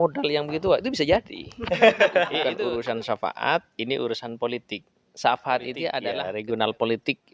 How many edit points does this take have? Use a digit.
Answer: 2